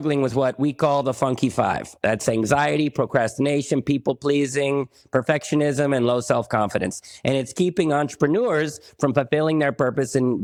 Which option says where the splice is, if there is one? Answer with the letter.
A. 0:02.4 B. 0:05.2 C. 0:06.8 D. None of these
D